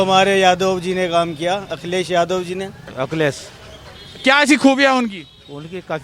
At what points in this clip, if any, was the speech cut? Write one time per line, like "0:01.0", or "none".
0:02.8

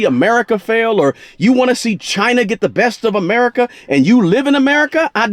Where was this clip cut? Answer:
none

